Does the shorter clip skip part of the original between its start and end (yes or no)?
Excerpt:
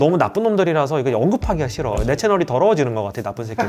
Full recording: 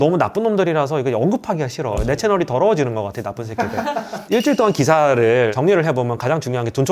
no